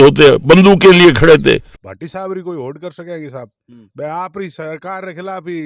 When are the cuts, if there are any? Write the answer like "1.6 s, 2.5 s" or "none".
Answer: 1.7 s